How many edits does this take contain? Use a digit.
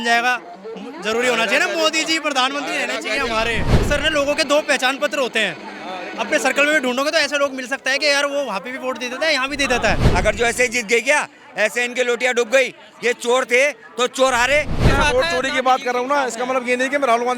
3